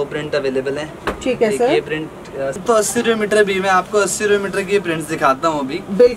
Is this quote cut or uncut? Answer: cut